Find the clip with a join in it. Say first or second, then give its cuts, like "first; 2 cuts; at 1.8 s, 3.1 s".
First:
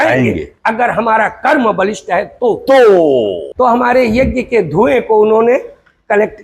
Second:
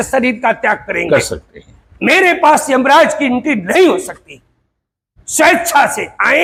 first; 1 cut; at 3.4 s